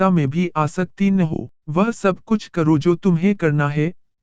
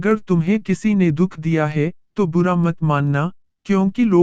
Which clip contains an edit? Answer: first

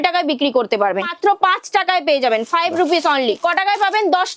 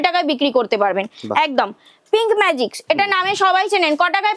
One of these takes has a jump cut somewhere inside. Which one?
first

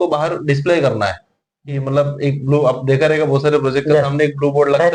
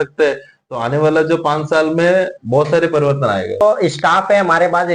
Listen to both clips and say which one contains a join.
second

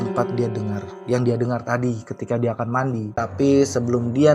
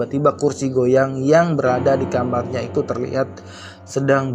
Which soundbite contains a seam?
first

